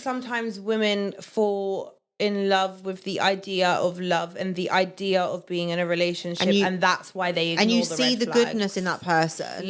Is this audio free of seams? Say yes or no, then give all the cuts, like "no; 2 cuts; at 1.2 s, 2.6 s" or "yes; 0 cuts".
yes; 0 cuts